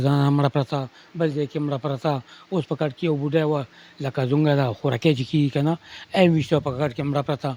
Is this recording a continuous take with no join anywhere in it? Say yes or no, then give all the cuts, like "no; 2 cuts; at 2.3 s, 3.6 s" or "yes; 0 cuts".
yes; 0 cuts